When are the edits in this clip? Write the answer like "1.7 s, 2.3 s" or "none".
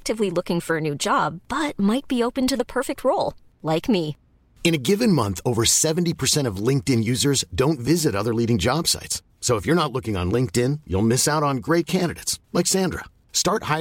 none